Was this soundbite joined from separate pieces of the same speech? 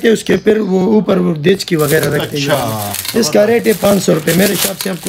no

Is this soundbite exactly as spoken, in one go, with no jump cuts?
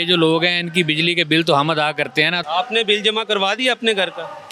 no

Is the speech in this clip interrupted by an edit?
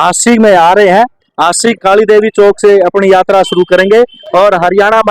yes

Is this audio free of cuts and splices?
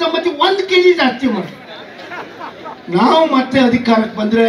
yes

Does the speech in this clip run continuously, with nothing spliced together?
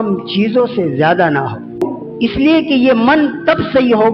no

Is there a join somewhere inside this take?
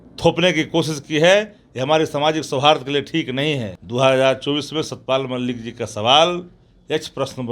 yes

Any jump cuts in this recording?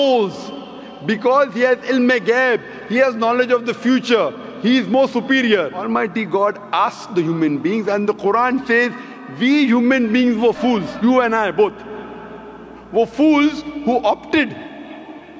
yes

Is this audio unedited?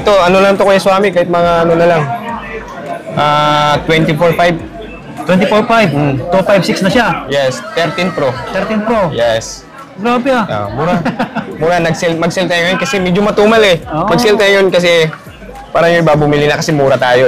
yes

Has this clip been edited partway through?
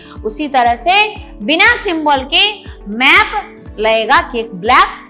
no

